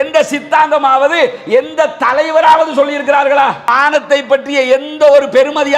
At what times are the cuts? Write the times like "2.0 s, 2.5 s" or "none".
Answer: 3.7 s